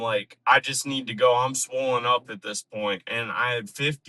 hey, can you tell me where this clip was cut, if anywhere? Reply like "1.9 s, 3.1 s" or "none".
3.1 s

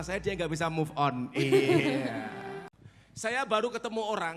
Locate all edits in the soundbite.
2.5 s

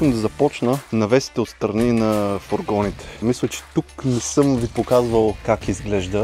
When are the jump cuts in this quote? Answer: 0.8 s, 3.2 s, 5.4 s

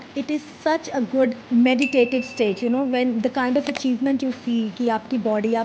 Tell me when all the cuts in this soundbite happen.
1.5 s

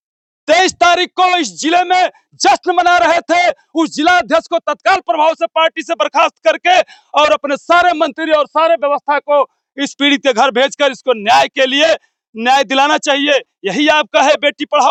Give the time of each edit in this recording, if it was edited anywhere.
none

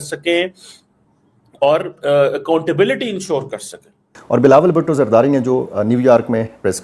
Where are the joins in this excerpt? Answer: 4.2 s

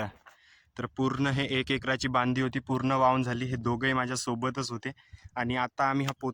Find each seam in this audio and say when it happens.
none

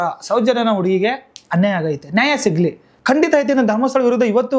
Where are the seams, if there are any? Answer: 2.9 s

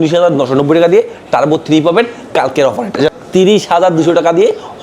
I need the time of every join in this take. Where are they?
3.2 s

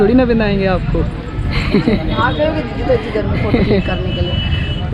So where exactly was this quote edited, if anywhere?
none

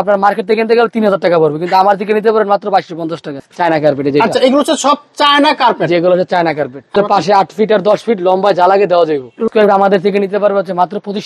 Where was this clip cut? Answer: 3.3 s, 6.9 s, 9.5 s

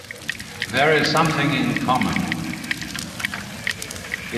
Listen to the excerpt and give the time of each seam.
2.3 s

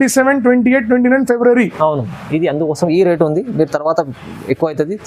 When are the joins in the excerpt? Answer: none

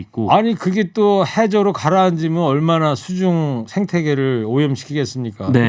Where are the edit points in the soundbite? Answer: none

